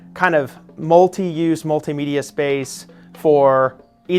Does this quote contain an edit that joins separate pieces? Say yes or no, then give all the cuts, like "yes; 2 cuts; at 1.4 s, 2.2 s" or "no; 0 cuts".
no; 0 cuts